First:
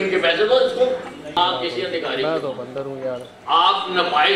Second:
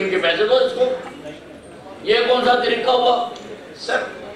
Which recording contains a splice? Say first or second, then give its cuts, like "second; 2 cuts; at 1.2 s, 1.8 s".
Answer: first; 1 cut; at 1.4 s